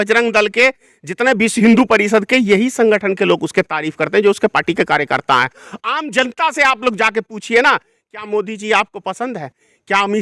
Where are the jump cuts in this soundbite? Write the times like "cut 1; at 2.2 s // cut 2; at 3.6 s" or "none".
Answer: none